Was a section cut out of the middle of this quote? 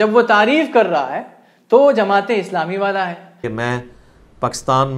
yes; 1 cut; at 3.5 s

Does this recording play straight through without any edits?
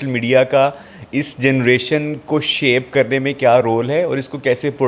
yes; 0 cuts

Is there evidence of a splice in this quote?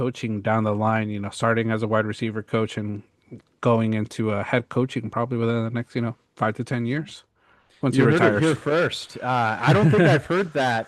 no; 0 cuts

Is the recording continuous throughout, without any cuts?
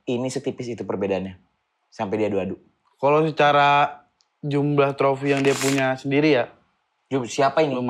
yes; 0 cuts

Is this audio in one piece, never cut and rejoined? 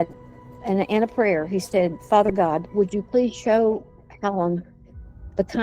no; 1 cut; at 2.7 s

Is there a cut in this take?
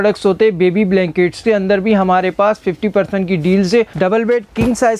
yes; 2 cuts; at 1.4 s, 3.9 s

